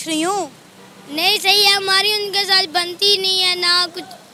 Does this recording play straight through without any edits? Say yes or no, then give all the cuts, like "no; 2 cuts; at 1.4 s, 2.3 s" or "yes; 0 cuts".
yes; 0 cuts